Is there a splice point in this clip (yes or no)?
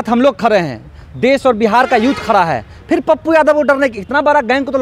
no